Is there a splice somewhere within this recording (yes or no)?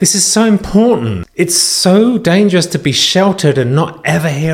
yes